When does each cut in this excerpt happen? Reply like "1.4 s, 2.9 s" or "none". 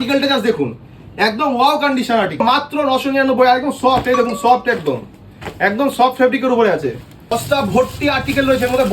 2.4 s, 7.3 s